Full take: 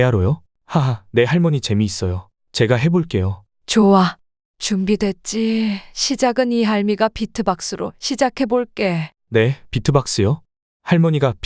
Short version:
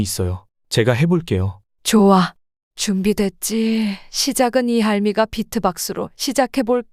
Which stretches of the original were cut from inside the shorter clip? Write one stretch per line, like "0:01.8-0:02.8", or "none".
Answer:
none